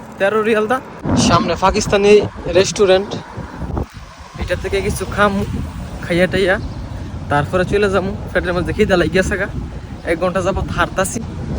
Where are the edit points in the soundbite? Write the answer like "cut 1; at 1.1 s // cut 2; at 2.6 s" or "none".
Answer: cut 1; at 0.9 s